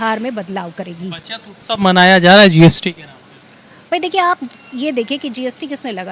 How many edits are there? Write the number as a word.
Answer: zero